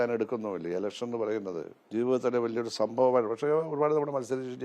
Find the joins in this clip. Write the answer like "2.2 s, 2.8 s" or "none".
1.8 s